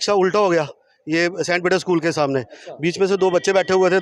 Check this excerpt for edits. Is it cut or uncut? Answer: uncut